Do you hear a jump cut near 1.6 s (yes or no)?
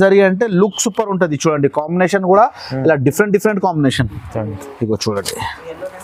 no